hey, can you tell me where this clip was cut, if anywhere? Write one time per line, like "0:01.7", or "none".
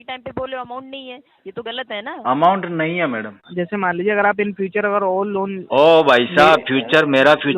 0:03.4